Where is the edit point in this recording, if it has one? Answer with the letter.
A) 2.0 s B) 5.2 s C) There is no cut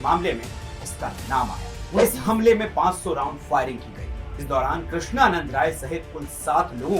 A